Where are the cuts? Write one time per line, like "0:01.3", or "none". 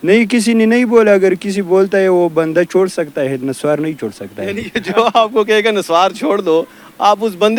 none